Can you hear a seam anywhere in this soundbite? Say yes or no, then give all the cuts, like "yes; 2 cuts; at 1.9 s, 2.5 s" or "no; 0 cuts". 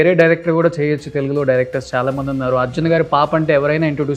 no; 0 cuts